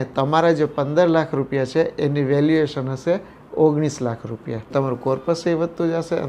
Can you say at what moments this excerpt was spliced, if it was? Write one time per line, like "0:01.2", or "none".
0:04.7